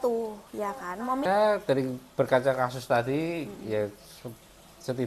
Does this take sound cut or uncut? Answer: cut